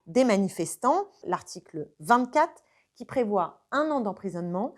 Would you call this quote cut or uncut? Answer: cut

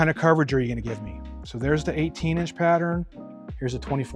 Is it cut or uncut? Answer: uncut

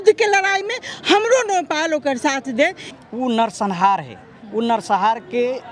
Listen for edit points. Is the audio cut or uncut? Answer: cut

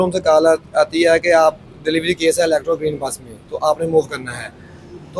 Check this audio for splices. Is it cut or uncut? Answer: uncut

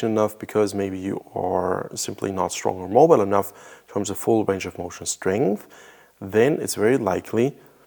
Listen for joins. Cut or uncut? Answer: uncut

